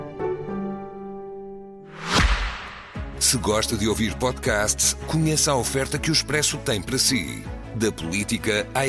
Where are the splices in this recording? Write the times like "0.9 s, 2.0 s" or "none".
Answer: 1.8 s